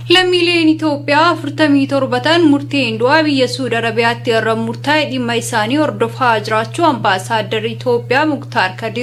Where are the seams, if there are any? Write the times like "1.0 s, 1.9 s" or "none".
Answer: none